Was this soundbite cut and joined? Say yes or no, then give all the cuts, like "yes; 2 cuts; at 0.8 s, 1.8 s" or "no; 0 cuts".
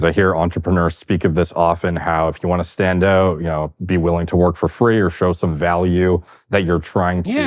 no; 0 cuts